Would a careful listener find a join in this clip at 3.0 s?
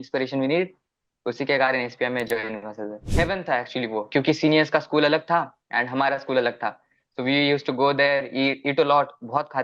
yes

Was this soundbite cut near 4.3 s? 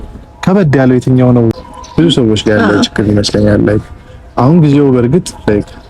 no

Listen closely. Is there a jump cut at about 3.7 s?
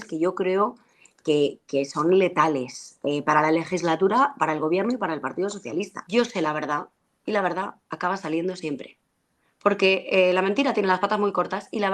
no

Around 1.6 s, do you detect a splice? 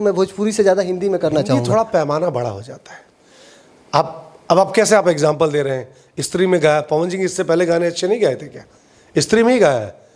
yes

